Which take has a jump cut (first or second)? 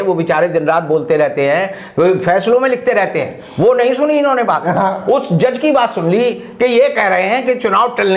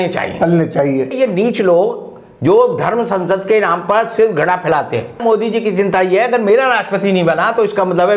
second